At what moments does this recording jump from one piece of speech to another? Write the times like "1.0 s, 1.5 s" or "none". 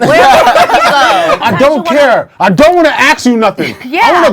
1.4 s